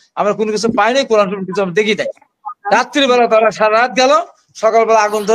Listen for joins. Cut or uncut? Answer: uncut